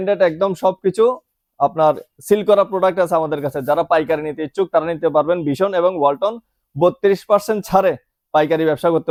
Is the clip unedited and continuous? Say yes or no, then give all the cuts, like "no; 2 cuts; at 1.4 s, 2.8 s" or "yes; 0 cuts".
yes; 0 cuts